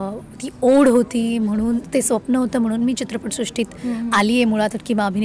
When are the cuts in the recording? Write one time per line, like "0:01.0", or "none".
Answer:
none